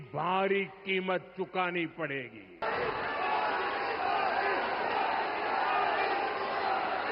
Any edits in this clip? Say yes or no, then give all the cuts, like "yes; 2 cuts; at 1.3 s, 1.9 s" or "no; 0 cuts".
yes; 1 cut; at 2.6 s